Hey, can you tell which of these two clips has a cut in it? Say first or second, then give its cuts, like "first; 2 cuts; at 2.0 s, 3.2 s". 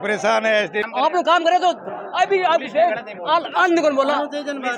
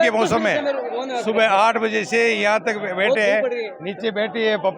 first; 1 cut; at 1.0 s